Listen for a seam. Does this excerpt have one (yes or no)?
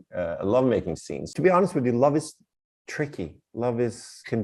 yes